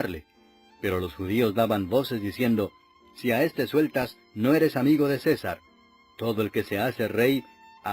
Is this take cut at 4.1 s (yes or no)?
yes